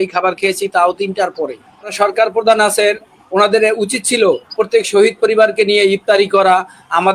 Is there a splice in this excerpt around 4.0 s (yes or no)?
no